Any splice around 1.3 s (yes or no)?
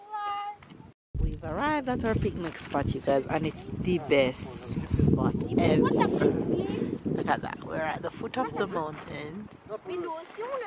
yes